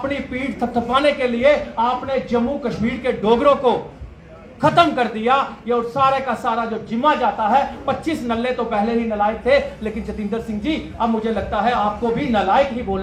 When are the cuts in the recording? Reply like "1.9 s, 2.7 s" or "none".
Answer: none